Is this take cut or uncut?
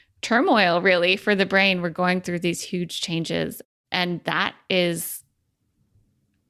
cut